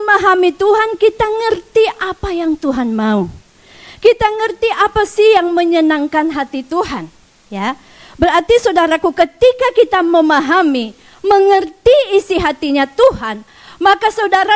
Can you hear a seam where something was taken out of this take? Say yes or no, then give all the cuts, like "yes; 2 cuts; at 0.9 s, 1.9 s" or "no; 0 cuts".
no; 0 cuts